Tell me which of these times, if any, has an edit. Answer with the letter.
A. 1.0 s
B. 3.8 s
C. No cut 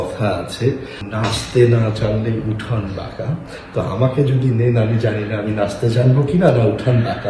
A